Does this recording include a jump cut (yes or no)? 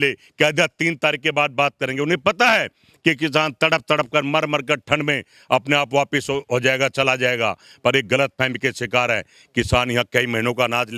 no